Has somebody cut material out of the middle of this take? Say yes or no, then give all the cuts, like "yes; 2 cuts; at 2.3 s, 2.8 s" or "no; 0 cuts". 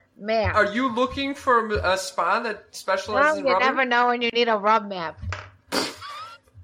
yes; 1 cut; at 4.3 s